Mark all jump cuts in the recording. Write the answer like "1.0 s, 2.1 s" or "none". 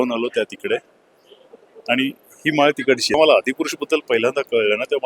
3.2 s